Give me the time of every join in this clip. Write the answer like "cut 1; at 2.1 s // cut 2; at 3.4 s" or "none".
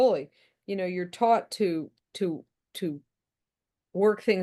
none

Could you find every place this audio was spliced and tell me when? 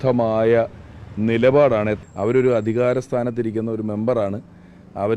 cut 1; at 2.0 s

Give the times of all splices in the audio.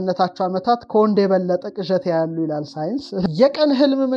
cut 1; at 3.3 s

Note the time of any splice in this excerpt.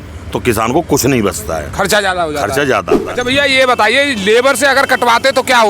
cut 1; at 3.0 s

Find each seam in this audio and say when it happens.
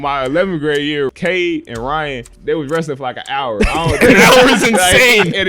cut 1; at 1.1 s // cut 2; at 2.3 s

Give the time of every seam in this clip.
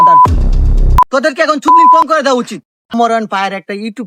cut 1; at 1.0 s // cut 2; at 2.9 s

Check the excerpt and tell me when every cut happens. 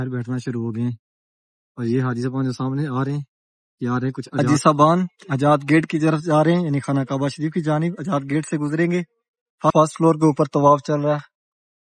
cut 1; at 4.4 s // cut 2; at 9.7 s

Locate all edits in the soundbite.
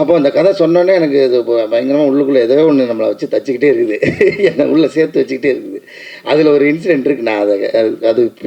none

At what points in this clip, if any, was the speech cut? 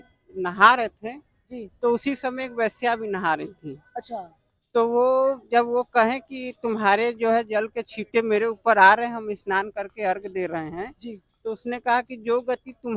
none

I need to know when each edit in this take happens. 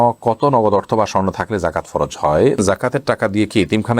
cut 1; at 2.6 s

